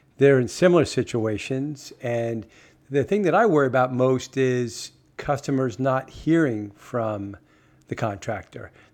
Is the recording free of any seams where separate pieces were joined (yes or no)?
yes